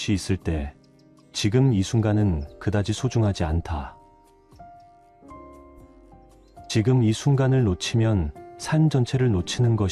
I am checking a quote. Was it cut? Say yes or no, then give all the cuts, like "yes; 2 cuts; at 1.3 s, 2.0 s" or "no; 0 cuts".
no; 0 cuts